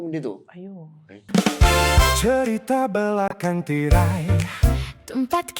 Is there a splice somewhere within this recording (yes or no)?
yes